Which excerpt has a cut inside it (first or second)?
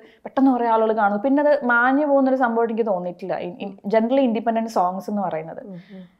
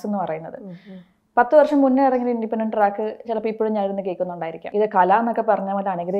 second